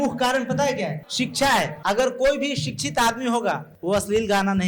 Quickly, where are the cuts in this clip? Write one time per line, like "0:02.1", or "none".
0:01.0
0:01.8
0:03.7

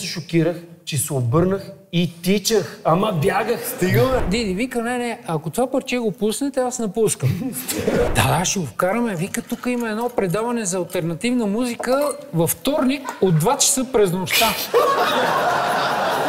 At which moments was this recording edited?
0:04.2
0:08.1

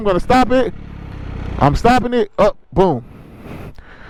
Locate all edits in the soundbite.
none

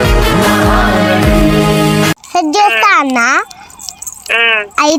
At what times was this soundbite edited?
none

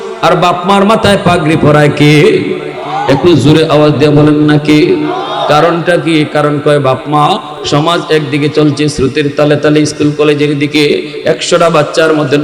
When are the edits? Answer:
0:07.6

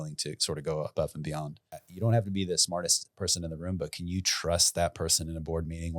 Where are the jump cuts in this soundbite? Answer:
0:01.9

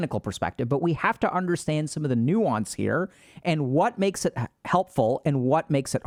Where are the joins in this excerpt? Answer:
none

